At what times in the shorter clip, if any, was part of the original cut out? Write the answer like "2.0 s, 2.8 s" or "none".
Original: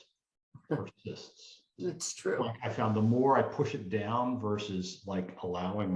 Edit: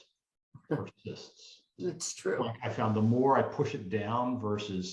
none